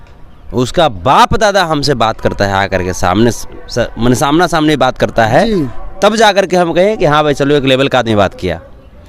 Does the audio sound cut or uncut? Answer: uncut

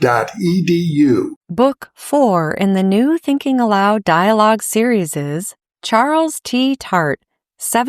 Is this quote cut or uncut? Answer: cut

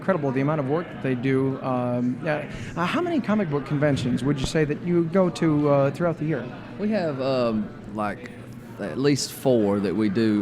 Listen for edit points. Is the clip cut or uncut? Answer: cut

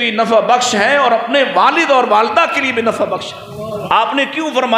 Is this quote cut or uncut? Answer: cut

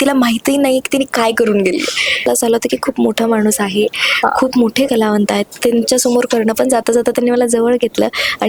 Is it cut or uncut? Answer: cut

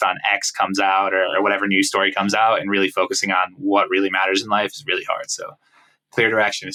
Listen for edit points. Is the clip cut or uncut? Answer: uncut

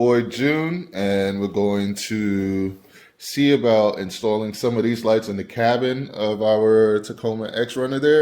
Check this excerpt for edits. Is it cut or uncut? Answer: uncut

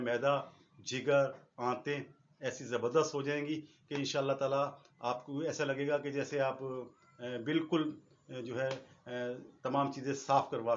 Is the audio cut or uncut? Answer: uncut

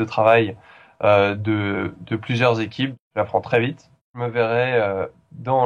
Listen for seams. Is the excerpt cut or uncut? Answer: cut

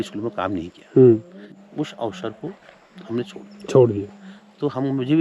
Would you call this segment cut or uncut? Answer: cut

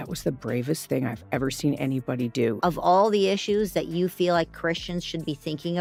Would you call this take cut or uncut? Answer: uncut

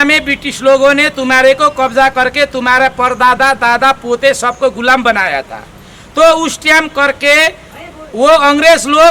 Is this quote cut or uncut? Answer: uncut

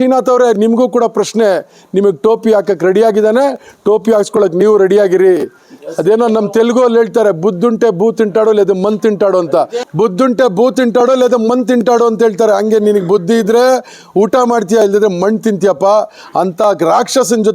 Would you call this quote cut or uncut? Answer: cut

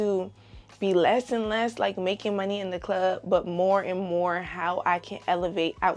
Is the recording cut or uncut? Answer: uncut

